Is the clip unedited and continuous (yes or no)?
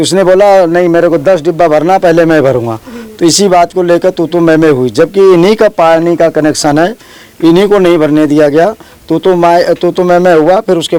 yes